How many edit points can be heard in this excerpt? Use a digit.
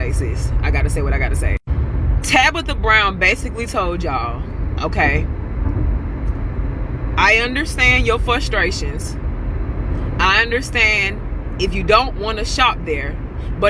0